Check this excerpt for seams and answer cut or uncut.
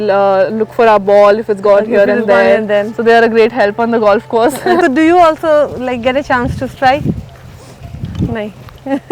cut